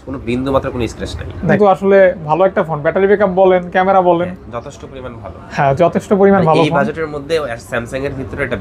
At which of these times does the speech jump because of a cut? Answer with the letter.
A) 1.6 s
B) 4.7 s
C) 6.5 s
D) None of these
A